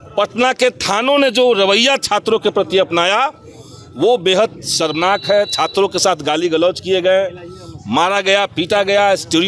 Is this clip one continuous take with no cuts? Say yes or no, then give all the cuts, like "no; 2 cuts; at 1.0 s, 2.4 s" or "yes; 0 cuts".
yes; 0 cuts